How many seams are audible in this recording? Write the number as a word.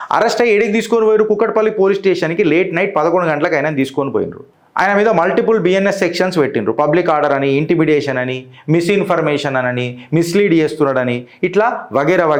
zero